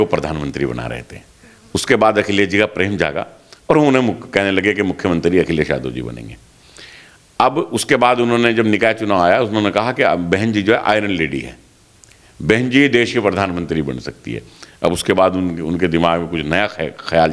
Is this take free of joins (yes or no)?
yes